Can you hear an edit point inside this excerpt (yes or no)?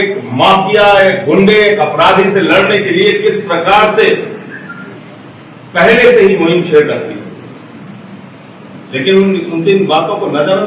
no